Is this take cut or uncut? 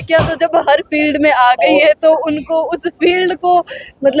uncut